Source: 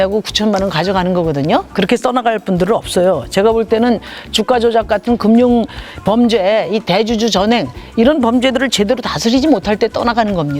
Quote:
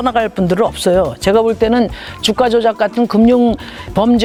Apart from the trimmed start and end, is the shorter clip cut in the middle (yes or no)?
no